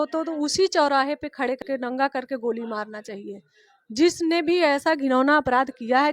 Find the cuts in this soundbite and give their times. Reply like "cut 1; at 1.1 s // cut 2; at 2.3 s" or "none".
cut 1; at 1.6 s

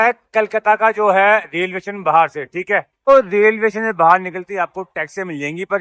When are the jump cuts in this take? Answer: cut 1; at 3.1 s

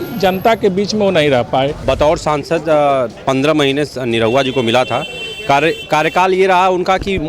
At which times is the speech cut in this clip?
cut 1; at 1.8 s

